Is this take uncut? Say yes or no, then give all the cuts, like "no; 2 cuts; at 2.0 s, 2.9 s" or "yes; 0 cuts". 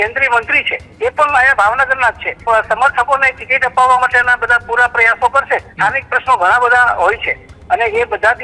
no; 2 cuts; at 2.3 s, 5.7 s